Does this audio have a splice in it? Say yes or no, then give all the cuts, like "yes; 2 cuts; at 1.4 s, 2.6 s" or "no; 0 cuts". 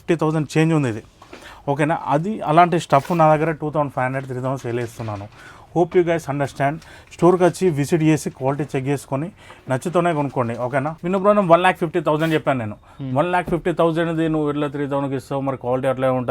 no; 0 cuts